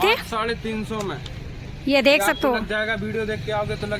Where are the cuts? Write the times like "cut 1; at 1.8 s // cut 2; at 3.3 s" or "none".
none